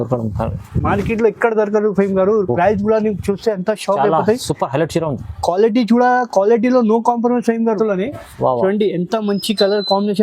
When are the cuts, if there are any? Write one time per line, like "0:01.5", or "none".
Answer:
0:07.8